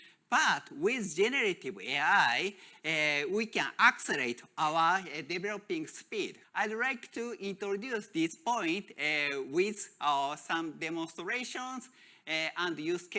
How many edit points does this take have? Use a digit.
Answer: 1